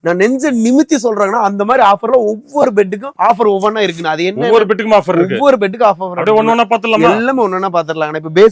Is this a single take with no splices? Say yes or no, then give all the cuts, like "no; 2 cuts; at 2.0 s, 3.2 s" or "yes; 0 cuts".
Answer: yes; 0 cuts